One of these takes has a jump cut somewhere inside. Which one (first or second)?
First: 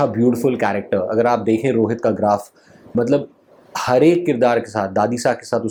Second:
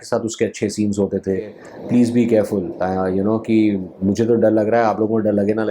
second